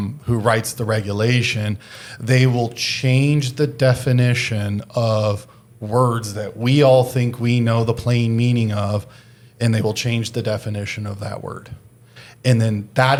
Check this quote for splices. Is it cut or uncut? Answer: uncut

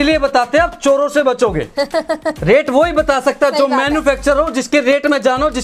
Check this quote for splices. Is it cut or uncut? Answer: uncut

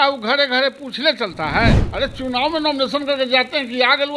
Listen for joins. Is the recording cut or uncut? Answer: cut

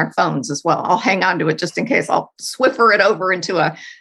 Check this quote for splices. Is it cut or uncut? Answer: cut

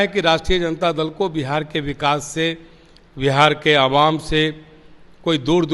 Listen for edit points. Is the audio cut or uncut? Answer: uncut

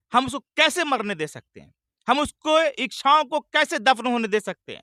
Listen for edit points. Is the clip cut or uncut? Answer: uncut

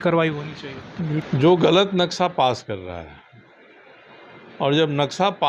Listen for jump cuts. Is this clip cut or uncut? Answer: cut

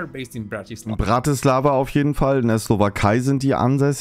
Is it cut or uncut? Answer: uncut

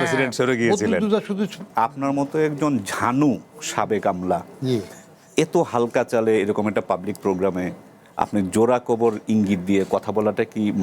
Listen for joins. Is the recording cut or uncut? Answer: cut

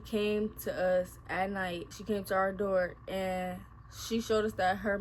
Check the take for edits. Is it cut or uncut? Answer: cut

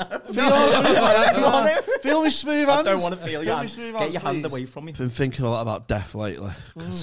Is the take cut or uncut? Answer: cut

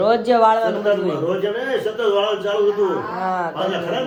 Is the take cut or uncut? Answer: uncut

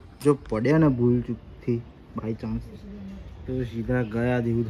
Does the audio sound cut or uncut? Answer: uncut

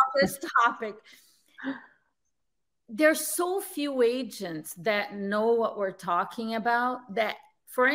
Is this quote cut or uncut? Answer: uncut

